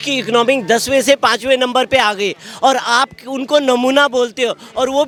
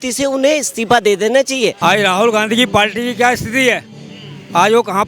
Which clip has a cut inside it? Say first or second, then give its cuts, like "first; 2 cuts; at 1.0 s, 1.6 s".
second; 1 cut; at 1.8 s